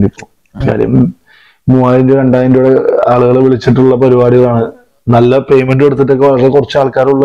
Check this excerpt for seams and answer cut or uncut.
uncut